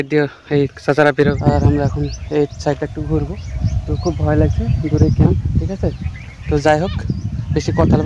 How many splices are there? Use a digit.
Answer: 0